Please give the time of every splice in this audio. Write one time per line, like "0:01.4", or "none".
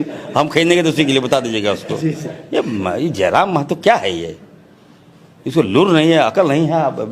none